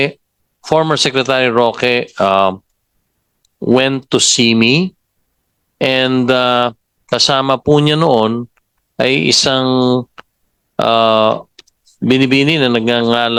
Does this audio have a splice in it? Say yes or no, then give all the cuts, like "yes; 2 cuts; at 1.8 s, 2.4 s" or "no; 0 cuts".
no; 0 cuts